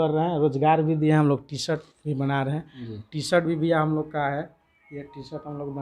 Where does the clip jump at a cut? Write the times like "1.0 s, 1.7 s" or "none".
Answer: none

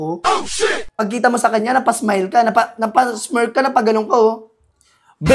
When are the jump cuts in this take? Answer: 0.9 s

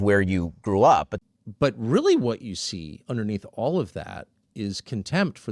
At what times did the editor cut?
1.2 s

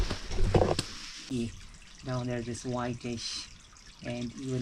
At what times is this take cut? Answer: 1.3 s

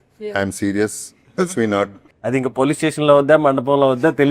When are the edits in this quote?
2.1 s

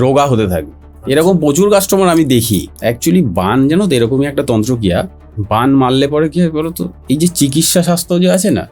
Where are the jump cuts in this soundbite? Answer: 2.7 s

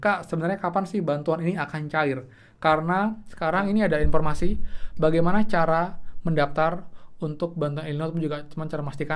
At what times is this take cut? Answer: 3.3 s

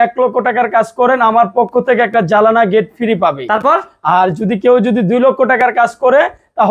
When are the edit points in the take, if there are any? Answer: none

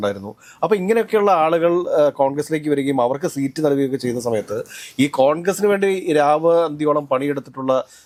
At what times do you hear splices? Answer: none

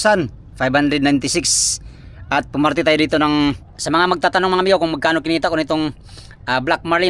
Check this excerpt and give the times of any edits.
3.7 s

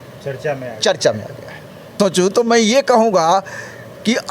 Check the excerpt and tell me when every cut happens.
1.8 s

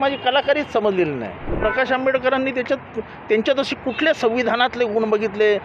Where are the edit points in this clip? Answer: 1.5 s

